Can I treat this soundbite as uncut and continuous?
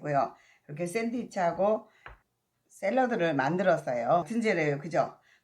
no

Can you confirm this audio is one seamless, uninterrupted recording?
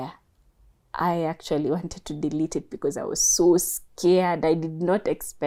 yes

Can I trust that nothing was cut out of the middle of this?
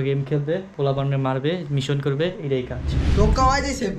no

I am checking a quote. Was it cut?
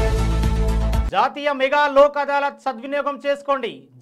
yes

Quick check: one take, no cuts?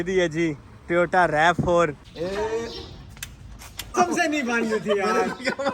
no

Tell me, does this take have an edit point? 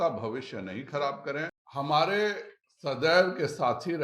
yes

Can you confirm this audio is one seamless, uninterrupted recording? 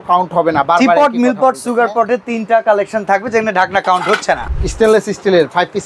no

